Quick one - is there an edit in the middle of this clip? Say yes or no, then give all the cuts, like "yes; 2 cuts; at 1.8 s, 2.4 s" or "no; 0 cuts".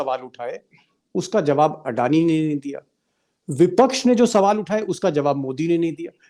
no; 0 cuts